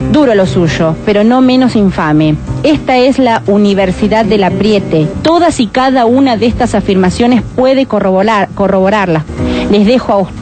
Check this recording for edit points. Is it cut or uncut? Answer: cut